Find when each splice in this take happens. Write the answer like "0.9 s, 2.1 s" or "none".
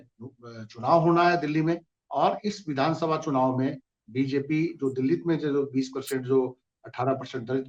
none